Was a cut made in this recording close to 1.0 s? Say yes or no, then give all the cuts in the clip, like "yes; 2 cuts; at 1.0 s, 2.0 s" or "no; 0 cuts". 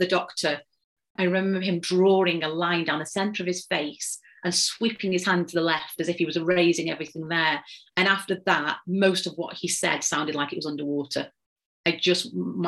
yes; 1 cut; at 1.0 s